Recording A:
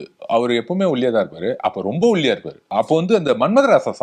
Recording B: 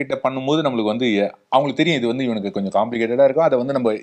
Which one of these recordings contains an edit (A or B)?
A